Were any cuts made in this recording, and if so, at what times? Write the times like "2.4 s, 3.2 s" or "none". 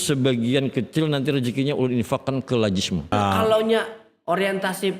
3.1 s

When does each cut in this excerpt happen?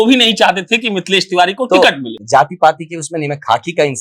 2.1 s

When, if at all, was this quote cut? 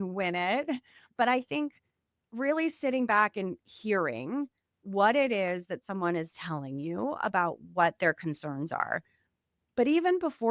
1.1 s

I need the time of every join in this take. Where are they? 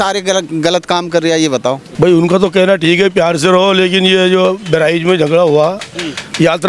1.9 s

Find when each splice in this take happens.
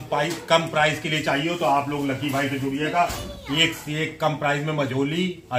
none

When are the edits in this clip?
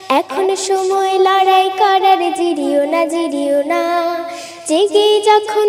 none

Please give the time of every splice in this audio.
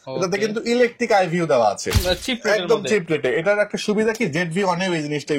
2.0 s

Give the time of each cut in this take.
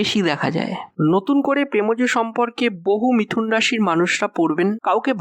0.9 s

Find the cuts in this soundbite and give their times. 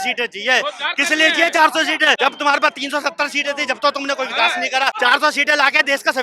2.2 s, 4.9 s

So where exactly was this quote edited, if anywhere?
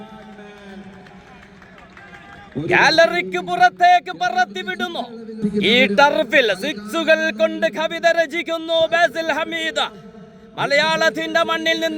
5.4 s

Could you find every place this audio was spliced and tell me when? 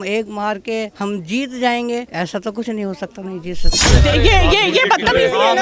0.9 s, 2.1 s, 3.8 s

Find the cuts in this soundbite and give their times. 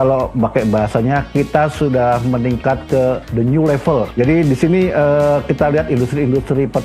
4.1 s

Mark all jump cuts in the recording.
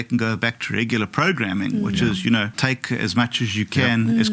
2.6 s

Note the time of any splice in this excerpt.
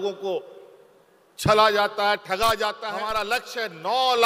3.2 s

